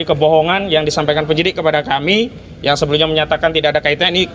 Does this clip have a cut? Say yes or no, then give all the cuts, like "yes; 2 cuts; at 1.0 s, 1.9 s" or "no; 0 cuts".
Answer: no; 0 cuts